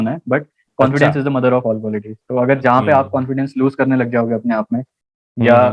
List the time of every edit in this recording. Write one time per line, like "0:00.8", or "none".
none

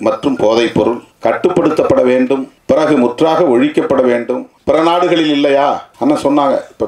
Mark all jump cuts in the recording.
0:01.1
0:02.5
0:04.5
0:05.9

